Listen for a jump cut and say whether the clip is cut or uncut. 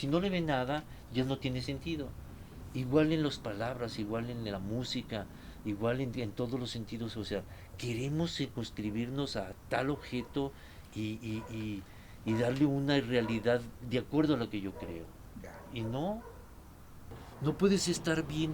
cut